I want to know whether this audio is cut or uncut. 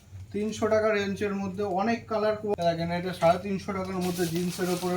cut